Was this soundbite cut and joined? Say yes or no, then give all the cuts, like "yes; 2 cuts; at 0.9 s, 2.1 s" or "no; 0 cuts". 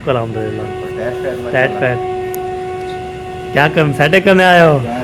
no; 0 cuts